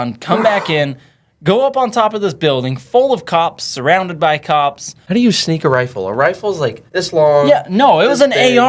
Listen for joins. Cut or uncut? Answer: cut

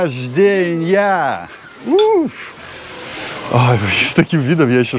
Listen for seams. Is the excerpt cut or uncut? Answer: uncut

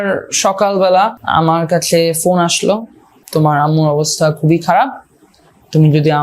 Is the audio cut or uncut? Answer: cut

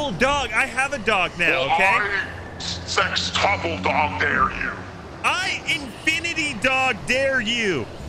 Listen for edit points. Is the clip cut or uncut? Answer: uncut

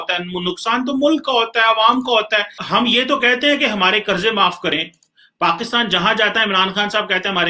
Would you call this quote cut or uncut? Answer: uncut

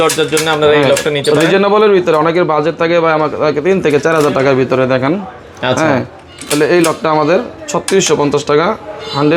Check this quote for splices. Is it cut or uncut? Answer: uncut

